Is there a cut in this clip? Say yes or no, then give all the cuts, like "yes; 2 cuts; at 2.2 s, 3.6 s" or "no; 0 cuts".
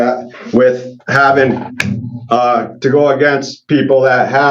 no; 0 cuts